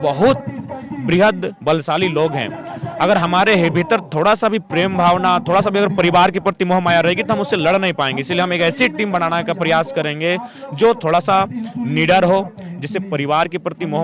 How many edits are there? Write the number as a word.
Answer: zero